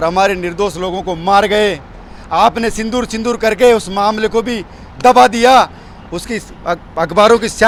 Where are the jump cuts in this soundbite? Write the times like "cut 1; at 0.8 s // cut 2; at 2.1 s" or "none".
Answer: none